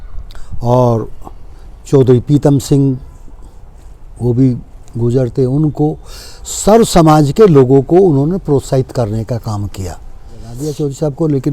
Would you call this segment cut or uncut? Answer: cut